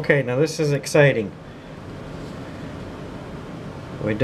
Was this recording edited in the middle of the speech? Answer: yes; 1 cut; at 1.8 s

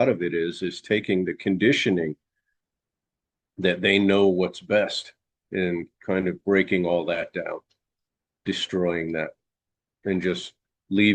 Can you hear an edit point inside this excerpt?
no; 0 cuts

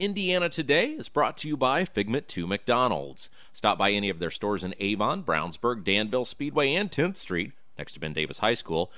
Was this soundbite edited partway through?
no; 0 cuts

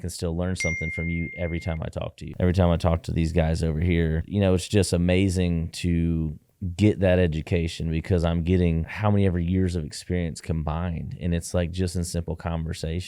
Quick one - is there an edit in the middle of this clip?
yes; 2 cuts; at 2.2 s, 4.2 s

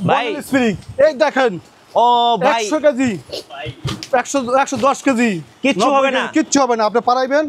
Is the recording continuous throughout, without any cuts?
yes; 0 cuts

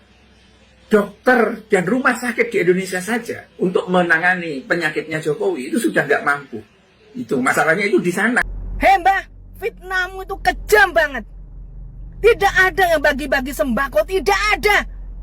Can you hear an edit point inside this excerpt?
yes; 1 cut; at 8.6 s

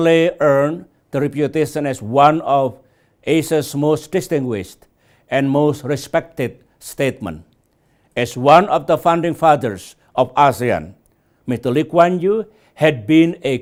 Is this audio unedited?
yes; 0 cuts

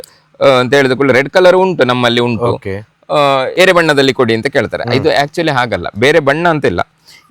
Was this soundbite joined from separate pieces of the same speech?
yes; 1 cut; at 3.5 s

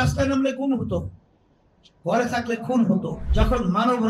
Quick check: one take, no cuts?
no; 1 cut; at 3.2 s

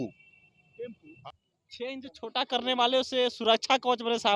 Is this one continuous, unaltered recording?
no; 1 cut; at 1.1 s

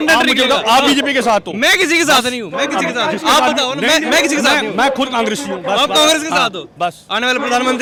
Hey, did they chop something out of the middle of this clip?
no; 0 cuts

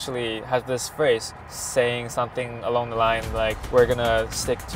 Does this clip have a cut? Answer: no; 0 cuts

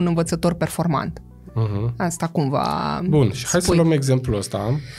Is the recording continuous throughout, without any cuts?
yes; 0 cuts

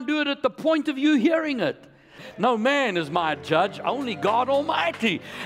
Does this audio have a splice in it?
yes; 1 cut; at 2.2 s

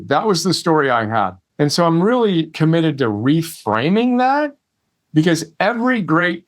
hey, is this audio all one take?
no; 2 cuts; at 1.4 s, 2.5 s

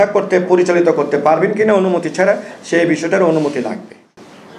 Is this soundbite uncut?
no; 1 cut; at 2.5 s

